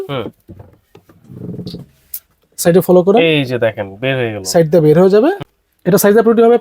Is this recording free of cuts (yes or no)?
no